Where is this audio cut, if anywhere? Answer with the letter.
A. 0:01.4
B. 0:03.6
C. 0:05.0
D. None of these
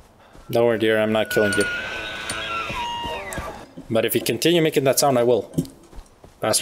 D